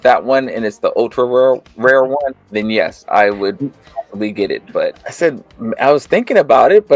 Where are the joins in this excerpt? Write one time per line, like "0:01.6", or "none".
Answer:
0:05.0